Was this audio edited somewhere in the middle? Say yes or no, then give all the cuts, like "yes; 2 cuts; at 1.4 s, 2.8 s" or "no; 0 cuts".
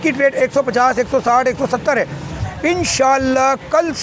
yes; 1 cut; at 2.3 s